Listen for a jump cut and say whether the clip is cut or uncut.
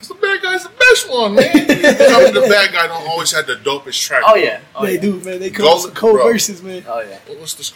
uncut